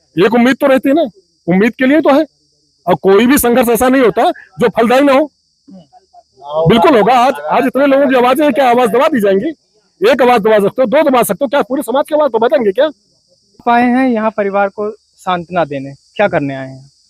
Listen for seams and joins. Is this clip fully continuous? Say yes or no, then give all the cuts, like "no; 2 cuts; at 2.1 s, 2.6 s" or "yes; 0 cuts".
yes; 0 cuts